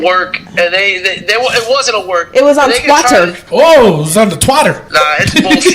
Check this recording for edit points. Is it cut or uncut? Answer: cut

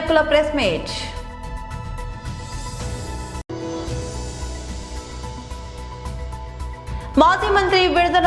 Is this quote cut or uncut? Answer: cut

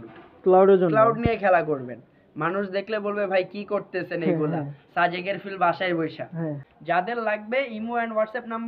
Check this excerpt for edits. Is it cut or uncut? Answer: cut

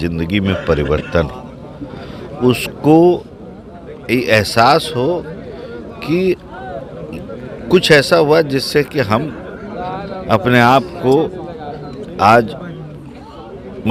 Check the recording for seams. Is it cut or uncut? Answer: uncut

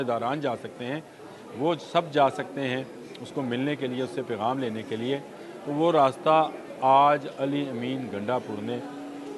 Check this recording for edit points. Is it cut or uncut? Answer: uncut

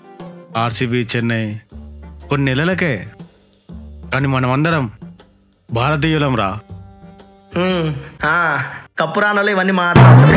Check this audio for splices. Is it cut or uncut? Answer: uncut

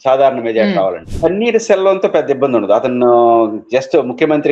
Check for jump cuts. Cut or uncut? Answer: cut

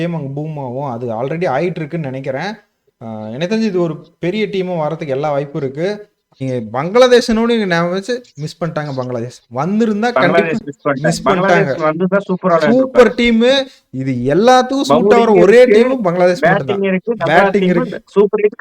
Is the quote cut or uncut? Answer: cut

